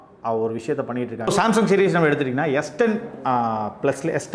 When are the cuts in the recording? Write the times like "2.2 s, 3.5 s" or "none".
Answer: 1.3 s

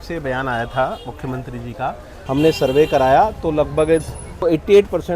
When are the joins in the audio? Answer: 2.1 s, 4.4 s

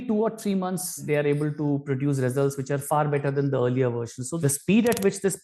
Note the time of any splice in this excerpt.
1.0 s, 4.4 s

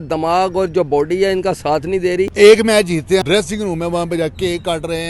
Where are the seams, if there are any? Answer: 2.3 s, 3.2 s

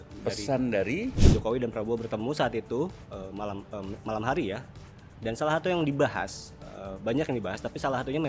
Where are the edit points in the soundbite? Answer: 1.2 s

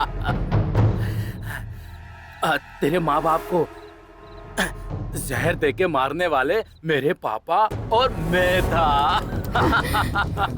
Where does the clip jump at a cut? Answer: none

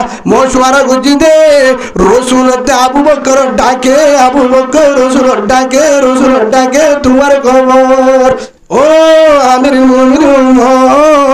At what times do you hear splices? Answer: 8.5 s

